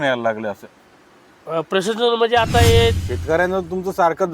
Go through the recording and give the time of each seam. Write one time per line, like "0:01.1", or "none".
0:03.1